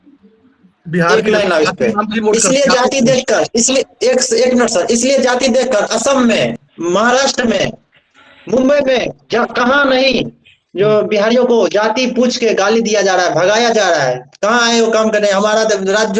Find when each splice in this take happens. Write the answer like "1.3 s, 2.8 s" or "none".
none